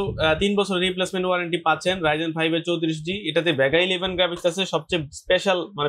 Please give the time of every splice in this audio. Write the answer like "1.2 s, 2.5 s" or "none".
none